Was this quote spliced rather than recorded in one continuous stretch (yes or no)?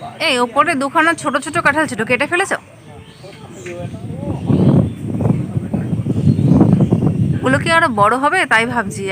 no